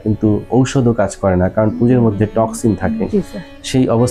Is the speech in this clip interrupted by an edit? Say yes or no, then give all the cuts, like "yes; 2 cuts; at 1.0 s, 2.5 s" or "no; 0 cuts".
no; 0 cuts